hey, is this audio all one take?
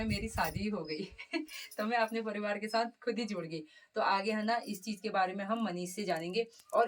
yes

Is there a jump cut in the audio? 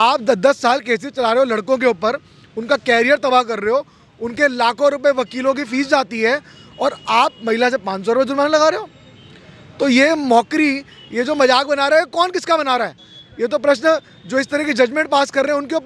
no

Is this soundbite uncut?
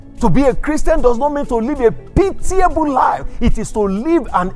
yes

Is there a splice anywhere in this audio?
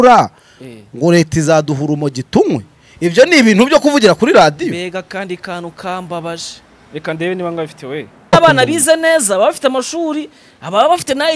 yes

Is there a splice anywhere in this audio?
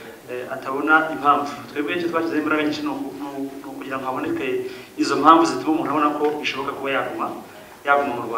no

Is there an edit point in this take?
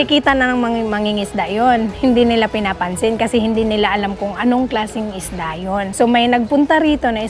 no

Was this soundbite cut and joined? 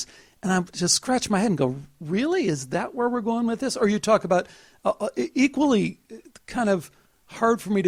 no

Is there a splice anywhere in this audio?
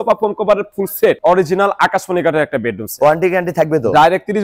yes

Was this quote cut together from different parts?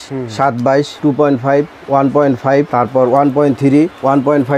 no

